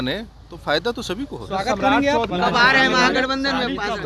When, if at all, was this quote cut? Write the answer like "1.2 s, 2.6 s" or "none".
2.3 s